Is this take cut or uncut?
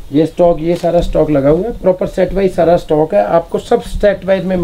uncut